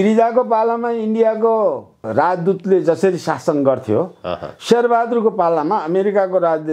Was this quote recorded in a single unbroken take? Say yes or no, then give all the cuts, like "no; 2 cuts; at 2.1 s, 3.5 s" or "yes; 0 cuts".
yes; 0 cuts